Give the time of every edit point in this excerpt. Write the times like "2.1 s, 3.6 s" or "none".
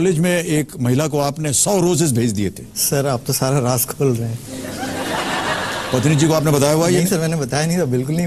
none